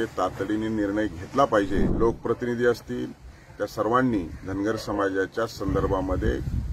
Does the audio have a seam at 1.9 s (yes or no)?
yes